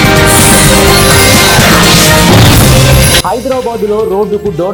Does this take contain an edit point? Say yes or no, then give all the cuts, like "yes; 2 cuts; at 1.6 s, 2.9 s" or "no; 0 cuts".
no; 0 cuts